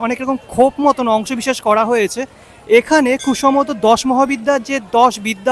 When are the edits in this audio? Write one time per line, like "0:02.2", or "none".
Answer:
none

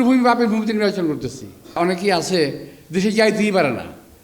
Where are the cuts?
0:01.8

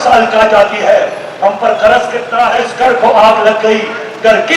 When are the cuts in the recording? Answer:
0:02.6

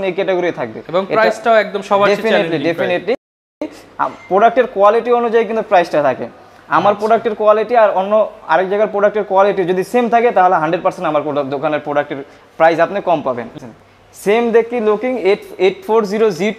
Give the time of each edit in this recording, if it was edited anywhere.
none

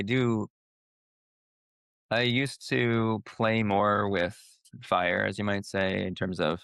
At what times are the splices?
none

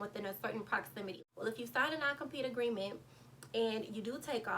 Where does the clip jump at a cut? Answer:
0:01.2

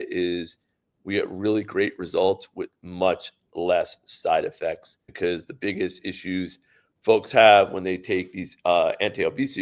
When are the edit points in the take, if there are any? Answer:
0:05.1

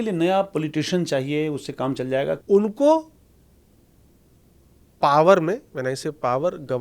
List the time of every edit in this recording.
0:02.4

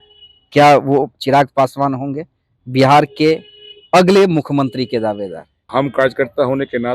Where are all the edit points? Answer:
0:05.7

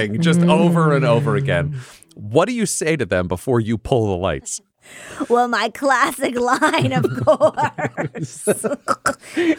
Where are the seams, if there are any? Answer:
none

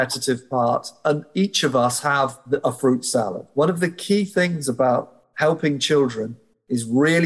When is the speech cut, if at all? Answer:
0:02.4
0:03.4

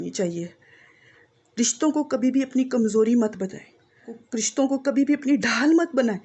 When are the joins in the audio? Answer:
0:04.2

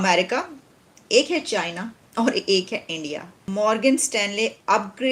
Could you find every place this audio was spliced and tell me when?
0:03.4

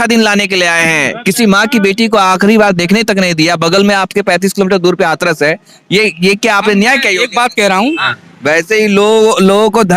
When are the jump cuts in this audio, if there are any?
0:07.9

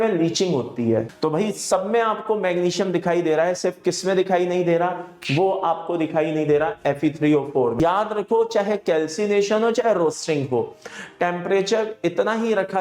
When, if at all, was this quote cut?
0:01.1
0:07.8

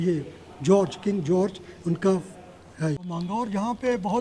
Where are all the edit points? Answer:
0:03.1

